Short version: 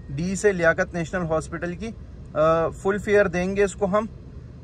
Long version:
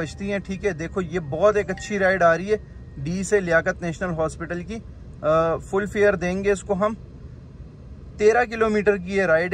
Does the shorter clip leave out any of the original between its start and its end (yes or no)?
no